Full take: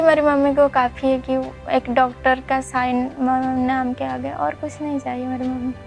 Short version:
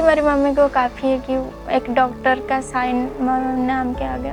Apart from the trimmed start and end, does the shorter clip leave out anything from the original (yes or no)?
no